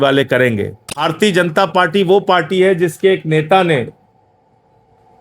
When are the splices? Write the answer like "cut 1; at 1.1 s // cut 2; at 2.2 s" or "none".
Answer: cut 1; at 1.0 s